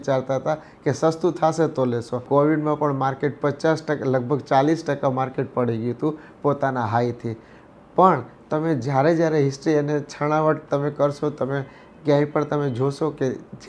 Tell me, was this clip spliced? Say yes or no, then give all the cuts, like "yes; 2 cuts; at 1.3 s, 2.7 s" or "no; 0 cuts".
yes; 1 cut; at 2.2 s